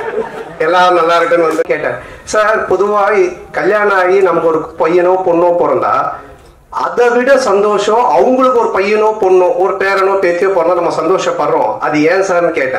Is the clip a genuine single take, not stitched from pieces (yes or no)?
no